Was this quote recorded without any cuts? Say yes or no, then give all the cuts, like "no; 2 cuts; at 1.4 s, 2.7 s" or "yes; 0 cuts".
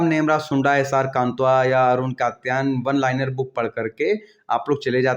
yes; 0 cuts